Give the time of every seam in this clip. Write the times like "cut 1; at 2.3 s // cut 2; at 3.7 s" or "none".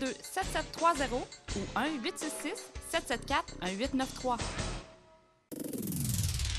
cut 1; at 5.6 s